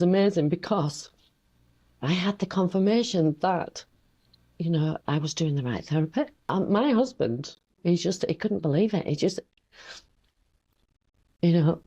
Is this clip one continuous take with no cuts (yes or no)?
no